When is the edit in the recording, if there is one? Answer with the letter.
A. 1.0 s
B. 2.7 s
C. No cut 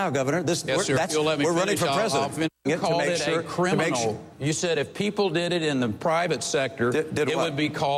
B